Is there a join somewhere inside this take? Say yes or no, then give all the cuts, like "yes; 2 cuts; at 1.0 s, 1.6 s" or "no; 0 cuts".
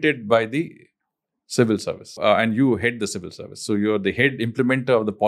yes; 1 cut; at 2.2 s